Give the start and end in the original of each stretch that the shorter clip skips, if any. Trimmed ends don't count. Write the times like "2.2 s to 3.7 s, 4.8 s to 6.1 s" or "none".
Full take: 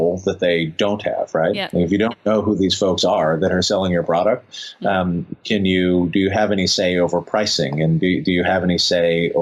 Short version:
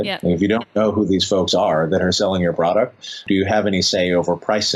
4.7 s to 6.1 s

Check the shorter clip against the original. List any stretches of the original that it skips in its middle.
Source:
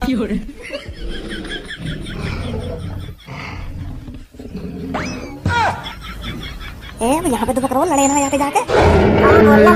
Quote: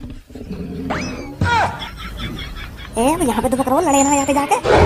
none

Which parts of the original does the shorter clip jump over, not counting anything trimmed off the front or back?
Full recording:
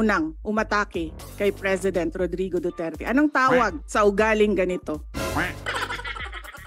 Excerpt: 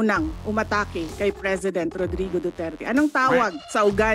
1.0 s to 1.2 s

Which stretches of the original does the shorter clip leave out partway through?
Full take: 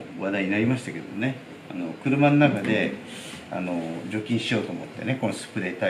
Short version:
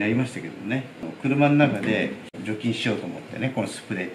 1.5 s to 1.8 s, 3.1 s to 4.0 s

